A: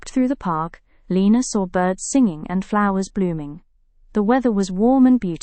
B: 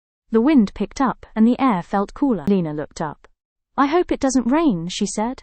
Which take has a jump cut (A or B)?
B